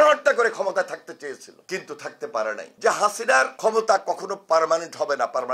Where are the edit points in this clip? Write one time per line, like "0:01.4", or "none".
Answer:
0:02.7

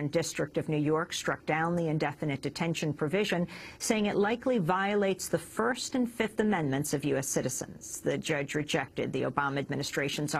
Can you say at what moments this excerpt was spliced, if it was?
0:07.3

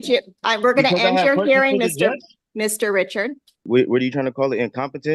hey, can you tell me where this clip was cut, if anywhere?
0:03.5

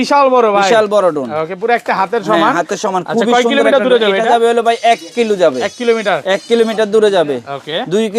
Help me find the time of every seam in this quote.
none

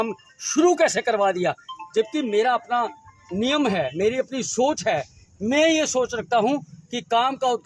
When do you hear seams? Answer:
none

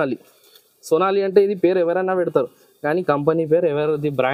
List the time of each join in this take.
none

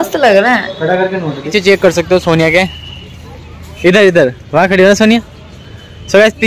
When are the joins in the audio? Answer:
0:01.4

